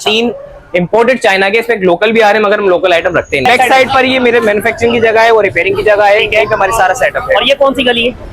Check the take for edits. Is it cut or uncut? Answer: cut